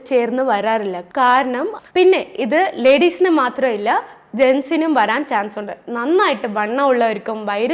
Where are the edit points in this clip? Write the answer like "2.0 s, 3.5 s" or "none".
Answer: 1.8 s